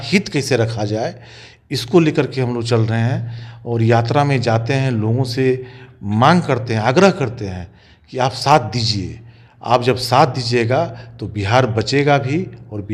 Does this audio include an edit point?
no; 0 cuts

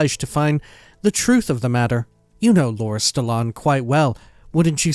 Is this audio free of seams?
yes; 0 cuts

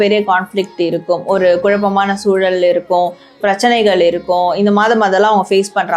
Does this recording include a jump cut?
no; 0 cuts

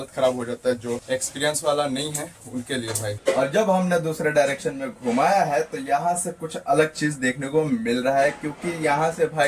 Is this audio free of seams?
no; 2 cuts; at 1.0 s, 3.1 s

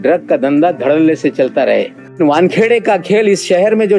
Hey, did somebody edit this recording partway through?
yes; 1 cut; at 2.2 s

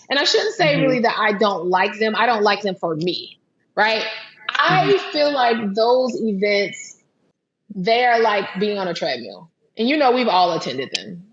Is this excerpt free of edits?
no; 1 cut; at 7.2 s

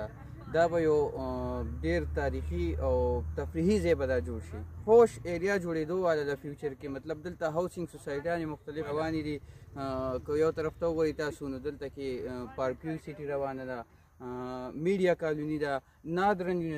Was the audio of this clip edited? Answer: yes; 2 cuts; at 4.8 s, 8.9 s

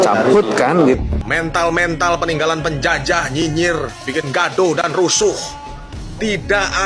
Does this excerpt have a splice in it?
yes; 1 cut; at 1.2 s

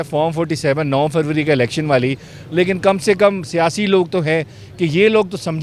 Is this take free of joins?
yes; 0 cuts

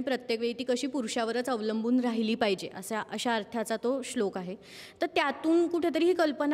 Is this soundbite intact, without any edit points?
yes; 0 cuts

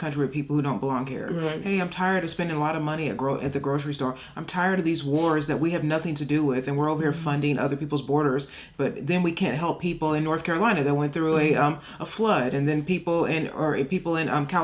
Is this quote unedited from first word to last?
yes; 0 cuts

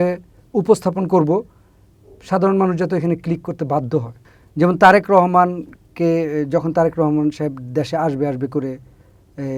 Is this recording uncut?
yes; 0 cuts

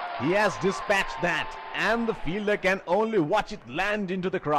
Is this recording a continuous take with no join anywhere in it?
yes; 0 cuts

